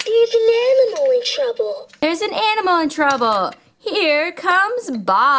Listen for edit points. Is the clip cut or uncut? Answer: cut